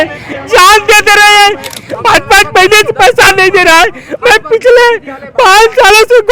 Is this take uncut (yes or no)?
no